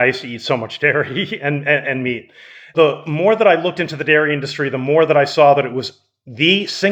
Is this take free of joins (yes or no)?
yes